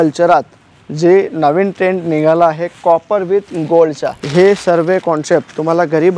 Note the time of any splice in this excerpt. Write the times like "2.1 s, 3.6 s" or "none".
4.1 s